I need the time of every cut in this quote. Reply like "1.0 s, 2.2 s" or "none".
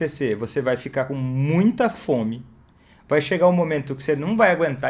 none